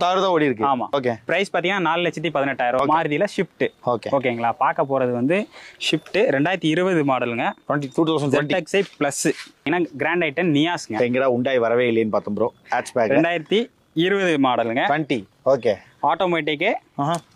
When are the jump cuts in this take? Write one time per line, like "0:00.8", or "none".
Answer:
0:02.8
0:09.7